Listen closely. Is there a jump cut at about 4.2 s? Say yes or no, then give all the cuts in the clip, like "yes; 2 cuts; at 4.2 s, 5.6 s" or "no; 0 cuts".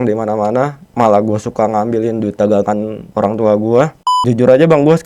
yes; 2 cuts; at 3.0 s, 4.2 s